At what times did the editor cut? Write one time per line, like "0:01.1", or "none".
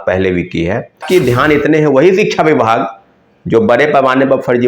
0:01.0